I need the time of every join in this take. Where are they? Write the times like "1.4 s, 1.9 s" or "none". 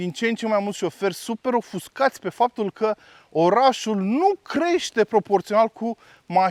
none